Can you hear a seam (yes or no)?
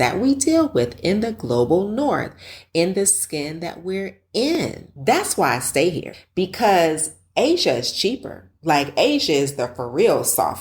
yes